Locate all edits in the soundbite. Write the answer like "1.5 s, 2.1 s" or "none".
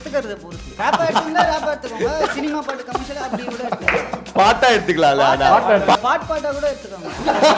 0.8 s, 6.0 s

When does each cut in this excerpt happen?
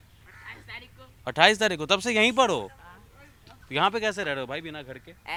none

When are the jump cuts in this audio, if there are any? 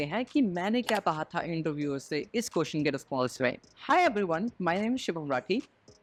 none

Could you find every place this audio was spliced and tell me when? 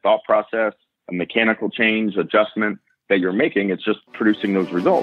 none

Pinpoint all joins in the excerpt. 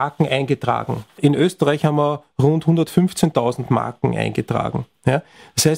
1.1 s

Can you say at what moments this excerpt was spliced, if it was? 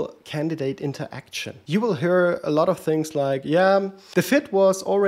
1.5 s, 4.0 s

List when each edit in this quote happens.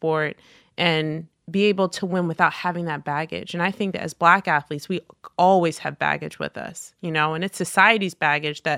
1.3 s

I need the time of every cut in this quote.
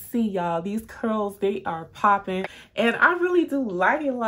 2.6 s

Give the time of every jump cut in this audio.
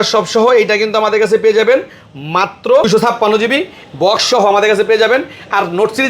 2.8 s

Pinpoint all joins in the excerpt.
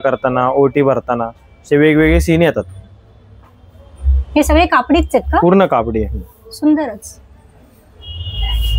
none

